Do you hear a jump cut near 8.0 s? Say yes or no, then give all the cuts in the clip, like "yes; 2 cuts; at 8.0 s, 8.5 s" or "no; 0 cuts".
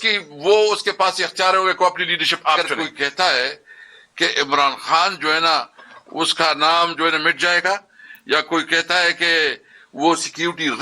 no; 1 cut; at 2.7 s